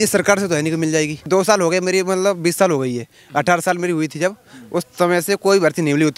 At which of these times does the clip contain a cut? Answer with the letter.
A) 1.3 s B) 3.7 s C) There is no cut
A